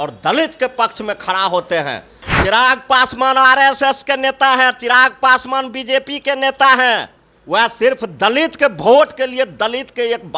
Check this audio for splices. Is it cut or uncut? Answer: cut